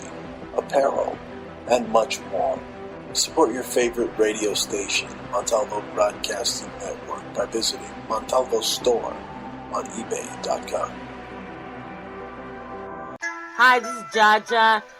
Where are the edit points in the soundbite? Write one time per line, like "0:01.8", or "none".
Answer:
0:13.2